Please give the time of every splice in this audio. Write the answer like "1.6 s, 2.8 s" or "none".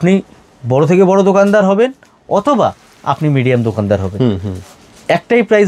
none

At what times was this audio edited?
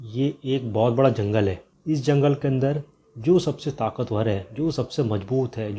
1.7 s

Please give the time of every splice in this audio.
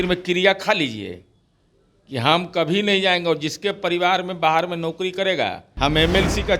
5.7 s

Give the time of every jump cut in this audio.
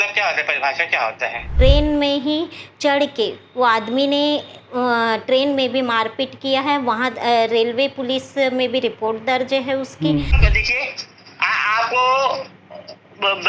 1.5 s, 10.3 s

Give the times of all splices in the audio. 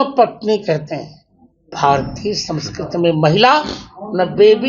1.7 s

